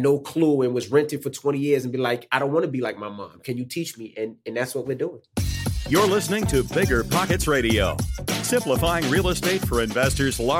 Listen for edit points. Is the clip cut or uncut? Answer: cut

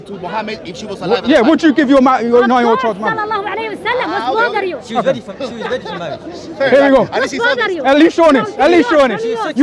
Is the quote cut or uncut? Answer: uncut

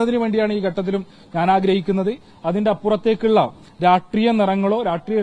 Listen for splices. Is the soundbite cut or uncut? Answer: uncut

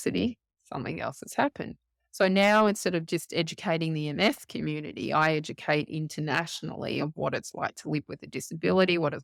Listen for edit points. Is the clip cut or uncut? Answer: uncut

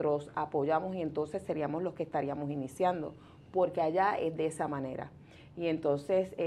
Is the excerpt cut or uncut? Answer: uncut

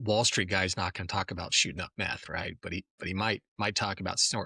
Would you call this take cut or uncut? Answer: uncut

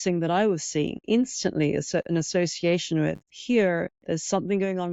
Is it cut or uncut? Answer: cut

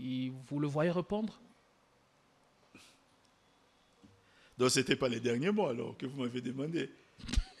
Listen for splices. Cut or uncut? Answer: uncut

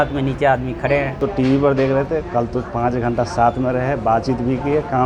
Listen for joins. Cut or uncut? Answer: cut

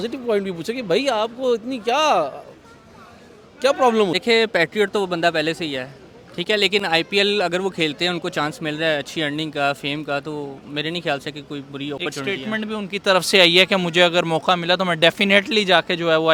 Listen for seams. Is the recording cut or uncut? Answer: uncut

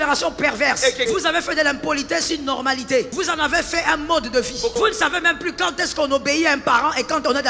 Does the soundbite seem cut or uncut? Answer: cut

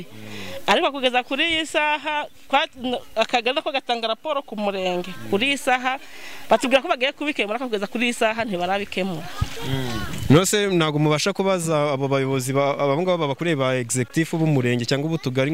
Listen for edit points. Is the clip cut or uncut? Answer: uncut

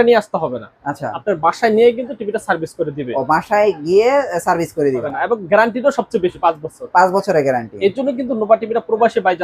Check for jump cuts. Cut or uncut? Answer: cut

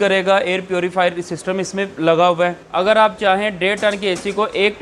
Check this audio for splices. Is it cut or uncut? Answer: cut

